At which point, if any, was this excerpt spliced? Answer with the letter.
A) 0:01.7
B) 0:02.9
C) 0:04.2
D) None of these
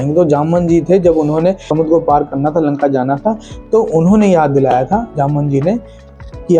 A